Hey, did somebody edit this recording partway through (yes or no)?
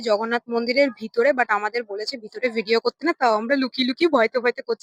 no